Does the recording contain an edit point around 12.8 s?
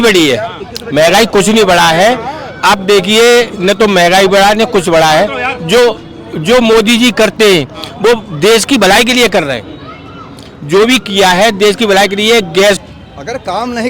yes; 1 cut; at 12.8 s

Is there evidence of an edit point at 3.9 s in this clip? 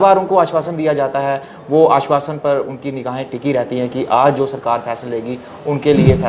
no; 0 cuts

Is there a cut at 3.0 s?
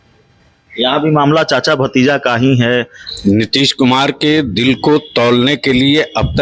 yes; 1 cut; at 3.0 s

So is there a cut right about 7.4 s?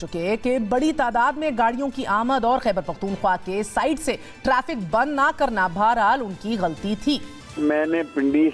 yes; 1 cut; at 7.4 s

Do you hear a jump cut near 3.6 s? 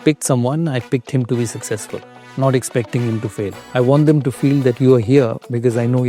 yes; 1 cut; at 3.6 s

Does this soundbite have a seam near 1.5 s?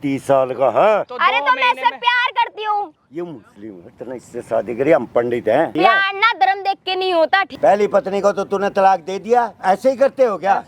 no; 4 cuts; at 2.9 s, 5.7 s, 7.5 s, 9.5 s

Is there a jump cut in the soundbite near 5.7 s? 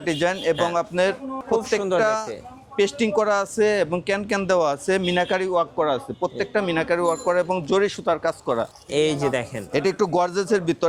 no; 1 cut; at 8.7 s

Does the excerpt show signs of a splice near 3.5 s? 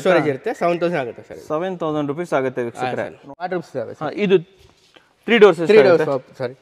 yes; 1 cut; at 3.5 s

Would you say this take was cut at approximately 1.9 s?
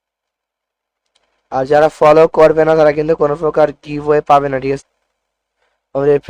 no; 1 cut; at 4.8 s

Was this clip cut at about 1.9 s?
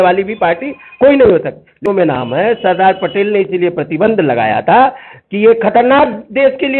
yes; 1 cut; at 1.9 s

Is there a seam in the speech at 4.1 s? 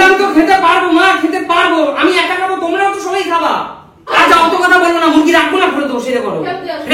yes; 1 cut; at 4.1 s

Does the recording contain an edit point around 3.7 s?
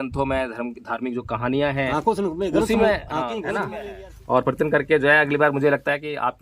yes; 1 cut; at 3.7 s

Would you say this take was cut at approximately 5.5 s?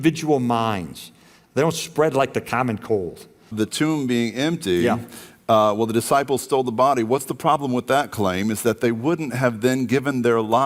no; 1 cut; at 3.5 s

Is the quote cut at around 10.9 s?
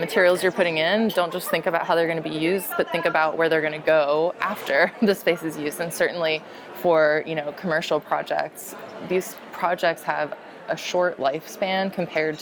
no; 0 cuts

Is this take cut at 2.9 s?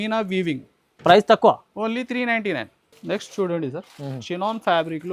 no; 0 cuts

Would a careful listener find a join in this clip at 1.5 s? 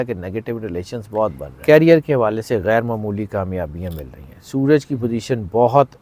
yes; 1 cut; at 1.5 s

